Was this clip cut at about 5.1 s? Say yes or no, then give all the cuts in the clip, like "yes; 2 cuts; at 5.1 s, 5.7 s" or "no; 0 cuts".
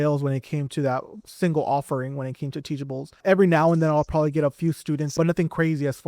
yes; 2 cuts; at 3.2 s, 5.1 s